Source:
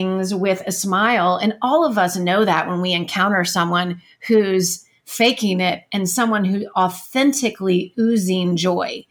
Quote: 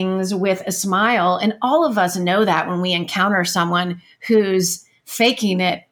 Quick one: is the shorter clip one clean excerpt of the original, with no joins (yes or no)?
yes